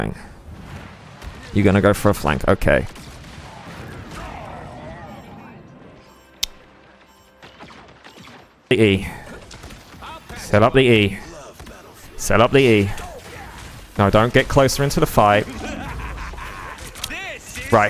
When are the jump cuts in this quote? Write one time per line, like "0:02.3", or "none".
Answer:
0:08.7

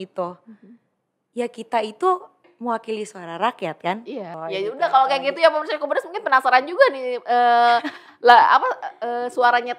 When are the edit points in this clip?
0:04.4

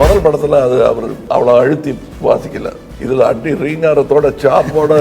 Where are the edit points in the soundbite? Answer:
0:01.1
0:02.1
0:02.9

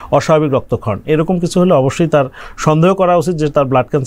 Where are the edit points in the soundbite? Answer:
none

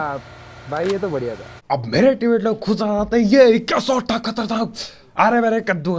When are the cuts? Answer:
0:01.5

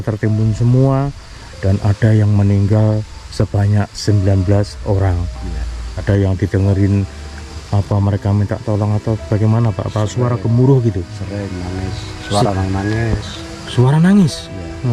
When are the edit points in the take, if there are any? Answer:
0:06.0

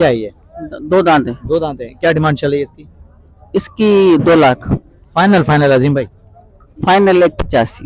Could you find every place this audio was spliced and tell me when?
none

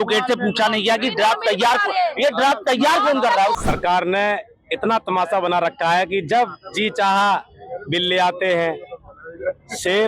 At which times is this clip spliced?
0:03.5

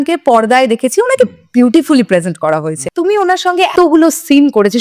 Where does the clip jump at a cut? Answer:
0:02.8
0:03.7

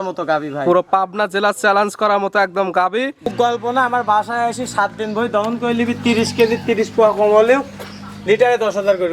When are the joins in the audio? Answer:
0:03.3

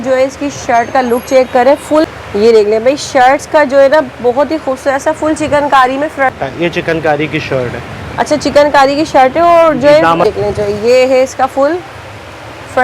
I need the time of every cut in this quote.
0:02.1
0:06.3
0:10.2

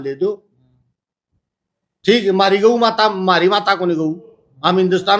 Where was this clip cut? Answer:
none

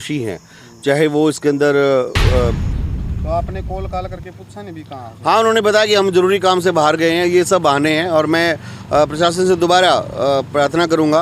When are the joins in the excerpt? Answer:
0:02.7

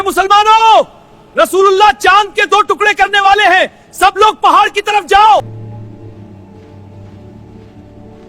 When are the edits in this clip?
0:05.4

